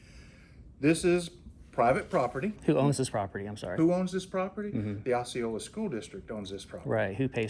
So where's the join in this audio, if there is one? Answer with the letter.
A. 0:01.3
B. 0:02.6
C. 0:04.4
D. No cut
B